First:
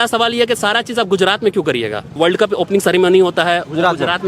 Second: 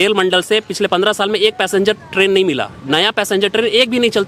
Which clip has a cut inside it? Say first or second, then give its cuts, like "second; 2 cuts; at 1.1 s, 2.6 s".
first; 1 cut; at 2.1 s